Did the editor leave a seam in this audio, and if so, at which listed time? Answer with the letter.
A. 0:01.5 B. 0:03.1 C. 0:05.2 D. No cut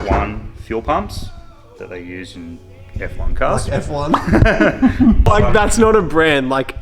C